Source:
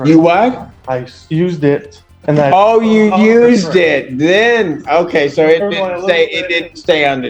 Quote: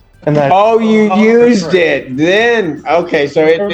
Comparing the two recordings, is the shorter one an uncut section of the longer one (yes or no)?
yes